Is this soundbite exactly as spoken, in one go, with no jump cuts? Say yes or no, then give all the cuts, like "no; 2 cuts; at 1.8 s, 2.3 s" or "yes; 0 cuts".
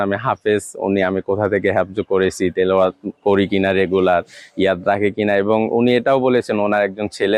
yes; 0 cuts